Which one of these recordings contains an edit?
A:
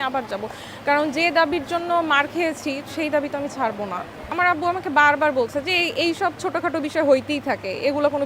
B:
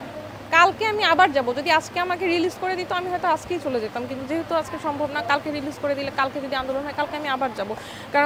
A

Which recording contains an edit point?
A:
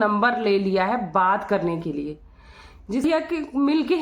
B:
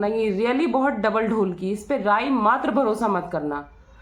A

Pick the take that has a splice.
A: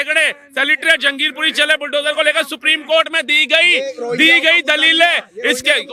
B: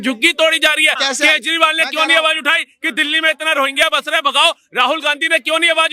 B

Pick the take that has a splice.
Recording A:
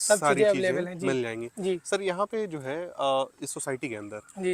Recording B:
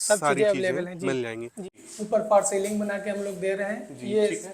B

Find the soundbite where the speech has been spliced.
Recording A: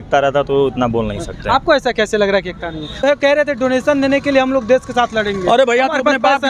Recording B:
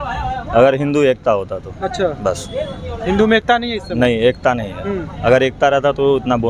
A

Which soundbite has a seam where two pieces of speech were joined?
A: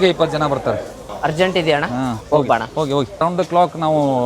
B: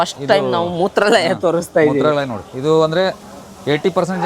A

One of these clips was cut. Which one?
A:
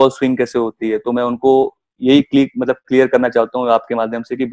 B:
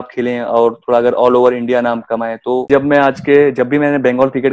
B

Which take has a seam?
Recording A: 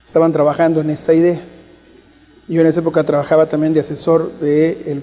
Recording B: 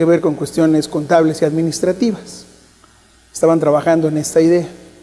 A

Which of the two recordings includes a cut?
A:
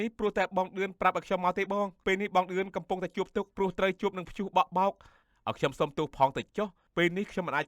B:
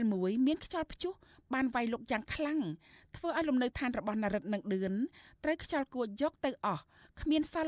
A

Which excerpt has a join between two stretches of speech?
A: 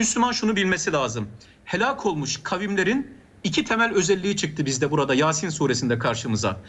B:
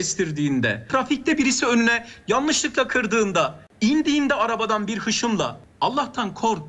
B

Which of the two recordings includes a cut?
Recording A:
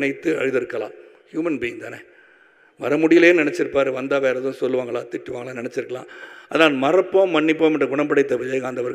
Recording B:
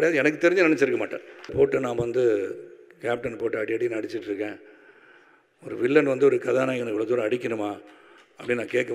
B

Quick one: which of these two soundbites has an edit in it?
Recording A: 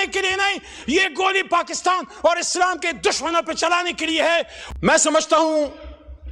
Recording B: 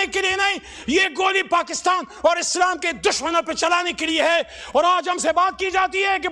A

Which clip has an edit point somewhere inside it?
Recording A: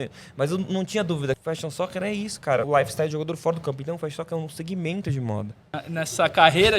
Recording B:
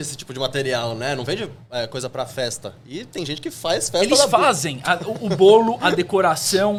A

